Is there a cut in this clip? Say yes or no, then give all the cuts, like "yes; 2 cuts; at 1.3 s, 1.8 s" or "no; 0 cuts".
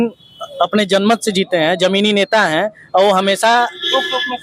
no; 0 cuts